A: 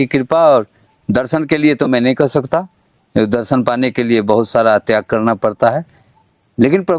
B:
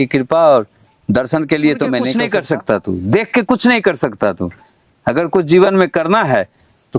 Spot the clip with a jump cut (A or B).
B